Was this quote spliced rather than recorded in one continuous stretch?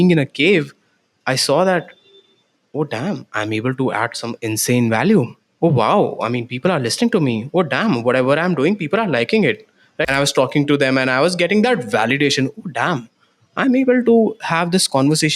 yes; 1 cut; at 10.1 s

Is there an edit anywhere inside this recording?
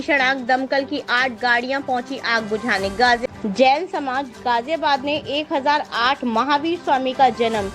yes; 1 cut; at 3.2 s

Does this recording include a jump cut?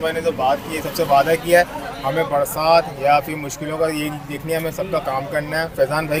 no; 0 cuts

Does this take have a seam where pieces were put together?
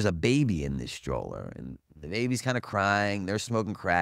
no; 0 cuts

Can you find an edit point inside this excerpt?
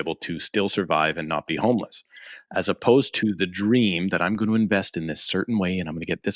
no; 0 cuts

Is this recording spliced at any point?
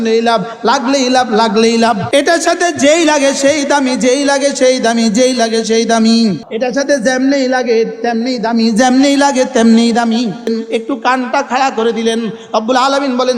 yes; 3 cuts; at 2.0 s, 6.5 s, 10.5 s

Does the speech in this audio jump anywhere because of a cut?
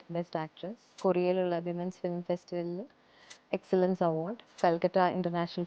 yes; 2 cuts; at 0.9 s, 4.5 s

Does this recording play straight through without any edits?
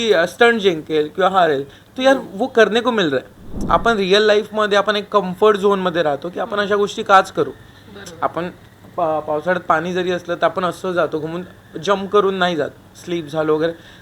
no; 1 cut; at 3.7 s

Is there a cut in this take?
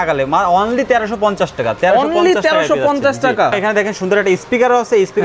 yes; 1 cut; at 3.6 s

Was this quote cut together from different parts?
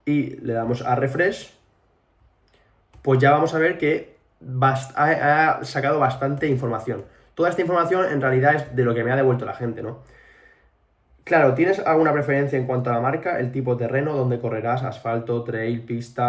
no; 0 cuts

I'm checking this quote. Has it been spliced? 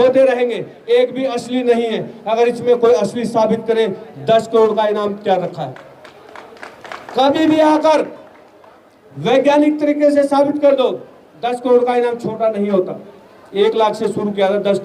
no; 0 cuts

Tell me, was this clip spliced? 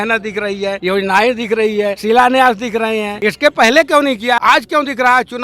yes; 4 cuts; at 0.8 s, 2.0 s, 3.1 s, 4.4 s

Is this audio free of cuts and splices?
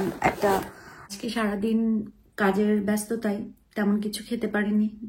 no; 1 cut; at 1.1 s

